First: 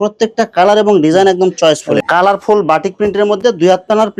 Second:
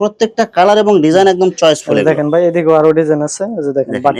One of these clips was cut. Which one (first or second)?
first